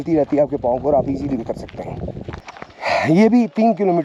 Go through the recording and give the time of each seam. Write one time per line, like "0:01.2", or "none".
0:02.5